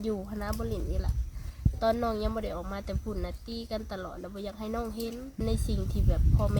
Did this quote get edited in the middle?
yes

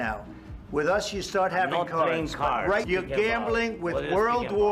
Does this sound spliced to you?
yes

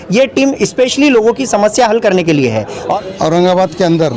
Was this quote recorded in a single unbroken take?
no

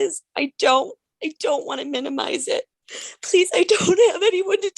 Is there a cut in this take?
yes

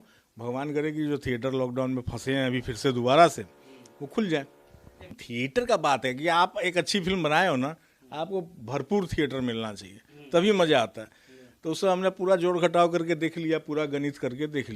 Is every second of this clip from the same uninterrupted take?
no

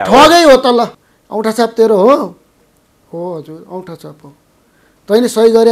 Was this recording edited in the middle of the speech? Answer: yes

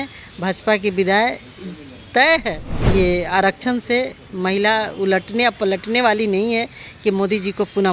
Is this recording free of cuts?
no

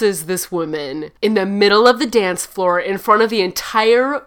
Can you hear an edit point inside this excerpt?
yes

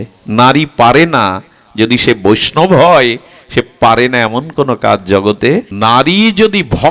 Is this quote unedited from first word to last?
no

